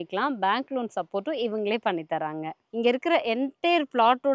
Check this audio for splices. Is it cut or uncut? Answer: cut